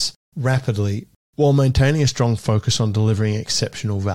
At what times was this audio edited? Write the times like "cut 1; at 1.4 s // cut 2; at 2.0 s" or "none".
cut 1; at 1.2 s